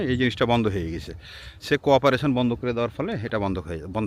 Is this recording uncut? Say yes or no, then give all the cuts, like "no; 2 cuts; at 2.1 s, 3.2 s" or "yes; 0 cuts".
yes; 0 cuts